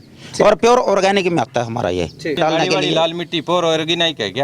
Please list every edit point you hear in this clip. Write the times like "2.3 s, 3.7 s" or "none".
2.4 s